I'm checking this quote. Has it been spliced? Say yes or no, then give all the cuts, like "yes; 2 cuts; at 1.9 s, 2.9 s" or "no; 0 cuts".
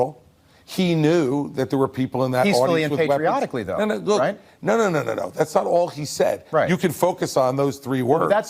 no; 0 cuts